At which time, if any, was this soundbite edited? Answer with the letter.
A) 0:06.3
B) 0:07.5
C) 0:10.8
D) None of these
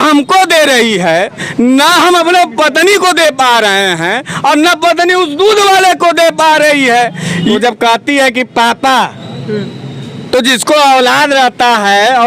B